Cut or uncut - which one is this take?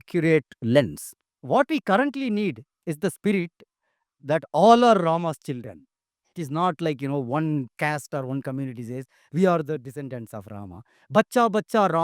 cut